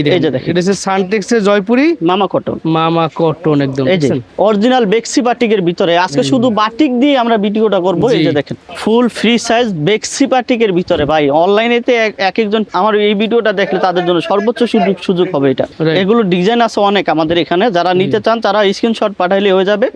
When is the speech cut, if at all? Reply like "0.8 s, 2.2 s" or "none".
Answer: 4.3 s, 8.7 s, 12.7 s, 15.7 s